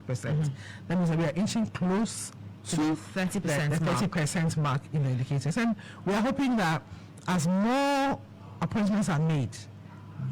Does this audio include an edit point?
no; 0 cuts

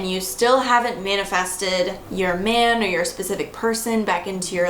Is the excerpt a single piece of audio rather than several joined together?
no; 1 cut; at 2.0 s

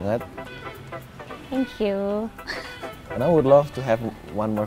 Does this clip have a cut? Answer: no; 0 cuts

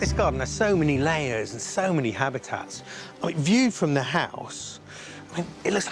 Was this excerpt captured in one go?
yes; 0 cuts

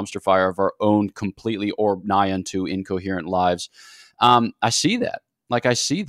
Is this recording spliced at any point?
no; 0 cuts

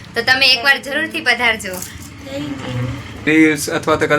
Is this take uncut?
no; 1 cut; at 3.3 s

